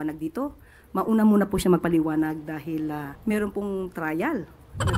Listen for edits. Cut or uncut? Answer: cut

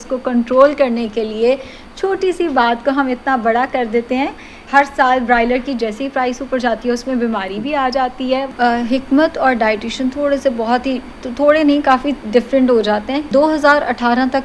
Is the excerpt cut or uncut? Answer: cut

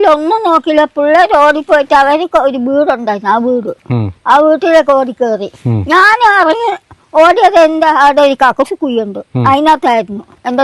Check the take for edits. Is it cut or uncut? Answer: uncut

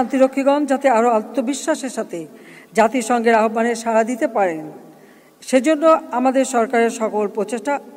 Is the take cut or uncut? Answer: uncut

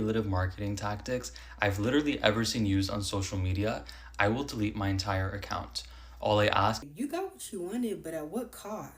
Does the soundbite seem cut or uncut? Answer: cut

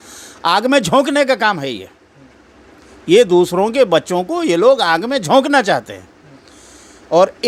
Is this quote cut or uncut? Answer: uncut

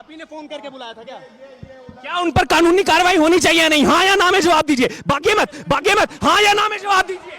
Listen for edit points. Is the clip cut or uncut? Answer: uncut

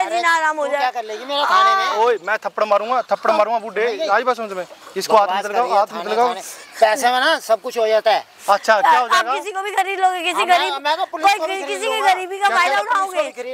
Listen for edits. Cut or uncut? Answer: uncut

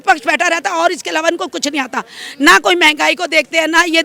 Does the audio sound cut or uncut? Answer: uncut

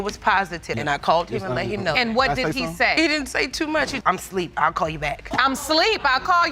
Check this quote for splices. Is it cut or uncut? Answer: uncut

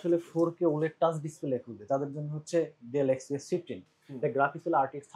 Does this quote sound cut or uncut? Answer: uncut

